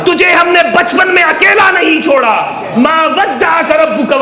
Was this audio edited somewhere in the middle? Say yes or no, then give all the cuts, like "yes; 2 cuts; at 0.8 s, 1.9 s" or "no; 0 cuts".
no; 0 cuts